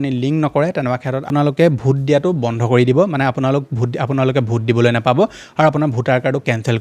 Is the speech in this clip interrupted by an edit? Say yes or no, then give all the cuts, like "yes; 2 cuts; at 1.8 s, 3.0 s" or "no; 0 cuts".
yes; 1 cut; at 1.3 s